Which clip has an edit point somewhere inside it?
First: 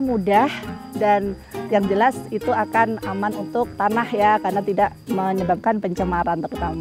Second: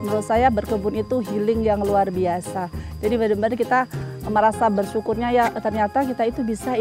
first; 1 cut; at 3.8 s

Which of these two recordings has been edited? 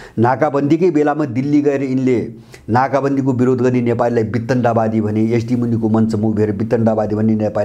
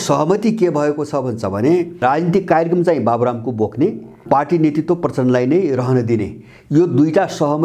second; 2 cuts; at 2.0 s, 4.2 s

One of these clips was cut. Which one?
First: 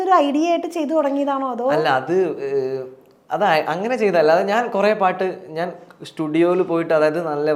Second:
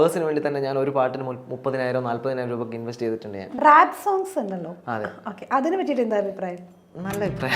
second; 1 cut; at 3.4 s

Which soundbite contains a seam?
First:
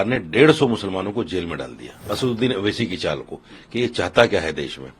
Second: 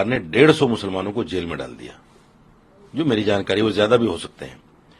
first; 1 cut; at 2.1 s

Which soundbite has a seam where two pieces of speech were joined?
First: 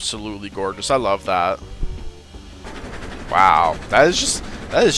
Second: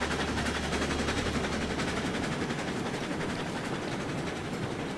first; 1 cut; at 2.6 s

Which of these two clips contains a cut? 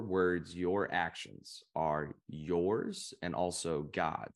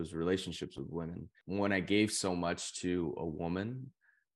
second; 1 cut; at 1.3 s

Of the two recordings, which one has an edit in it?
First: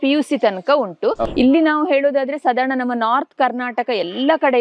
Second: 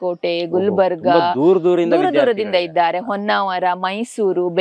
first; 1 cut; at 1.2 s

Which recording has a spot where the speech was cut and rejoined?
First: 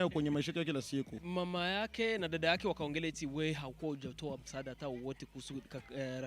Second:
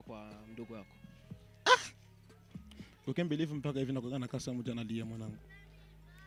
first; 1 cut; at 1.2 s

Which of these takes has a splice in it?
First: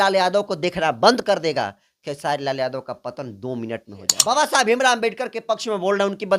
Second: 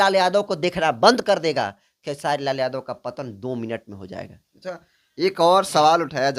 first; 1 cut; at 4.1 s

